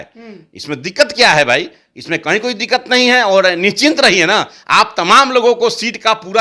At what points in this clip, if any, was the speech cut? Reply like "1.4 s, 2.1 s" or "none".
none

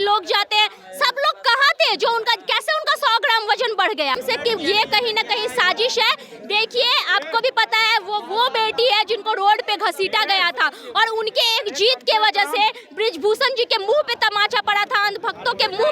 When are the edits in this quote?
4.2 s

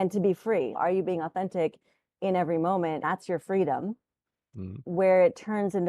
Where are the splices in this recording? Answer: 0.8 s, 3.0 s, 4.8 s

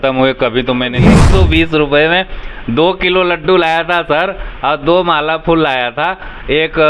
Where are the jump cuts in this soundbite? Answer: 1.2 s

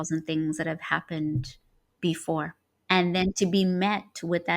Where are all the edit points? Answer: 2.7 s

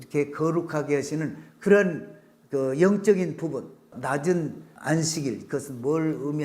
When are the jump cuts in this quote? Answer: 3.9 s, 4.7 s

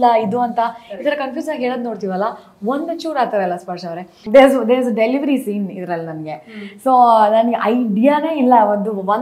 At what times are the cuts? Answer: 4.2 s

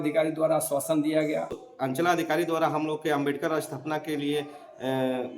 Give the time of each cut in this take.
1.6 s

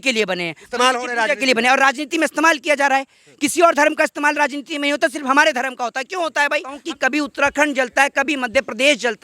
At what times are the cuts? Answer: 6.7 s

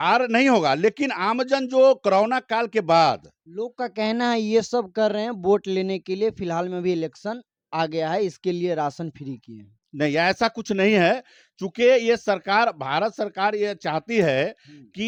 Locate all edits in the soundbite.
none

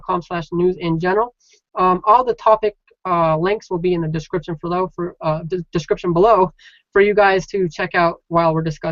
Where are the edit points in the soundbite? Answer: none

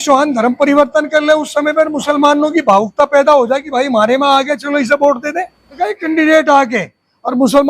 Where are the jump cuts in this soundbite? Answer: 5.9 s

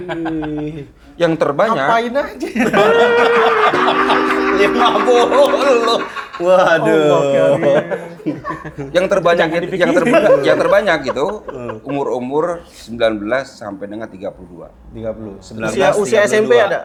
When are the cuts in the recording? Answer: none

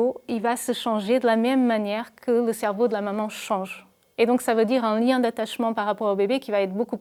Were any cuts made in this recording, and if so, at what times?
none

